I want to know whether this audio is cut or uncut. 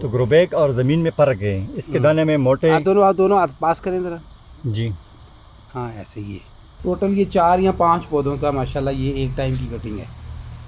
cut